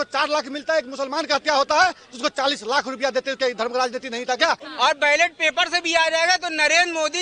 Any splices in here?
yes; 1 cut; at 4.7 s

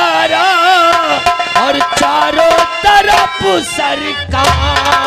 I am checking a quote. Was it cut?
no; 0 cuts

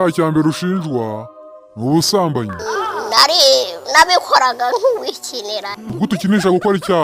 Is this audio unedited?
yes; 0 cuts

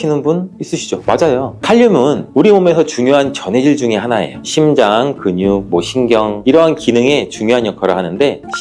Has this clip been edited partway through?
yes; 1 cut; at 1.6 s

